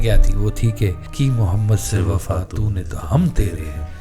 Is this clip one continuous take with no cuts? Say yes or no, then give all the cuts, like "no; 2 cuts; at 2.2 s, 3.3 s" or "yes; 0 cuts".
no; 1 cut; at 1.0 s